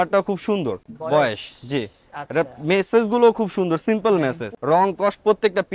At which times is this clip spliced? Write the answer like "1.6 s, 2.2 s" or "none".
0.9 s, 4.5 s